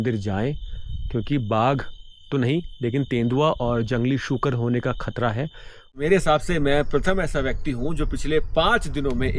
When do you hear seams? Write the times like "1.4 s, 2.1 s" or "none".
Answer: 6.0 s